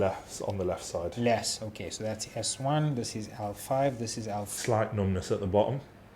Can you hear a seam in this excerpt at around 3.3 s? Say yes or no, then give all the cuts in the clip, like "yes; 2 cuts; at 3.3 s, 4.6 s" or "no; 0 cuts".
no; 1 cut; at 4.5 s